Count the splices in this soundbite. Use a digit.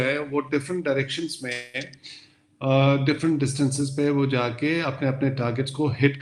0